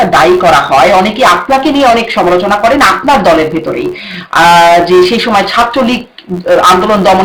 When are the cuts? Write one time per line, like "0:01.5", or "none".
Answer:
none